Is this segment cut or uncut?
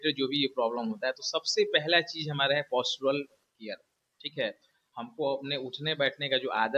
uncut